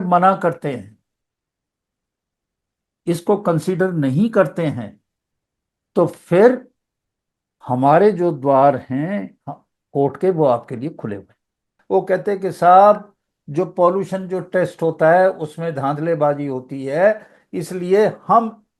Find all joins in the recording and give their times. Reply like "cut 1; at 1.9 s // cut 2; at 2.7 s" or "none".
cut 1; at 11.7 s